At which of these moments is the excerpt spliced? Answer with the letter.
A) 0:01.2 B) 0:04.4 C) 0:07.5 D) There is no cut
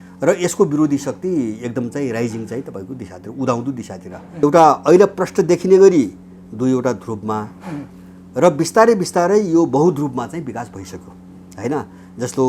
B